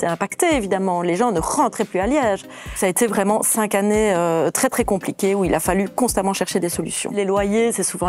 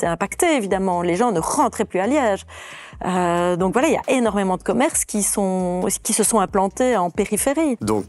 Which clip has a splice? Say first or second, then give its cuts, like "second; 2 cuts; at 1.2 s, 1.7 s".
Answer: first; 2 cuts; at 2.8 s, 7.1 s